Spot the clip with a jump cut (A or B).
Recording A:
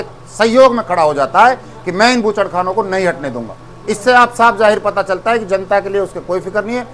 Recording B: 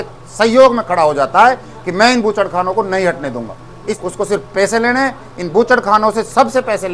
B